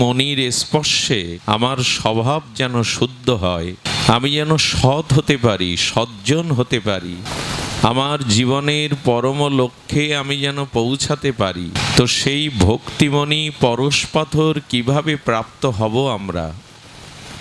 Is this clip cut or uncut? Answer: cut